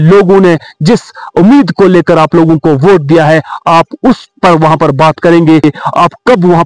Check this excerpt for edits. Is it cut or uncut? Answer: cut